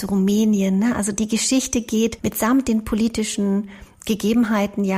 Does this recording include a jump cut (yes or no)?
yes